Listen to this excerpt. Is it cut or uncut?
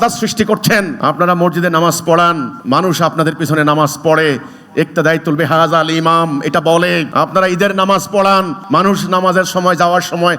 cut